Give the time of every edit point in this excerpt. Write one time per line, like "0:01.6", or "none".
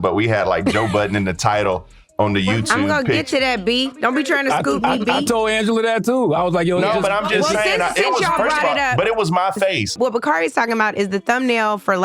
0:09.9